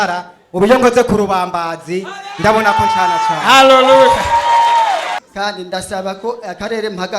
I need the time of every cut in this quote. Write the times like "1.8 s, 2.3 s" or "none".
5.2 s